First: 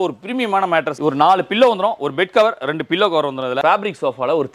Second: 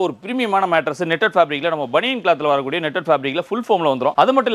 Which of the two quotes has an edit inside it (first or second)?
first